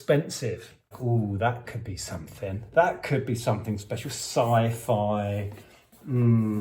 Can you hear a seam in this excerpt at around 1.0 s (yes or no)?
yes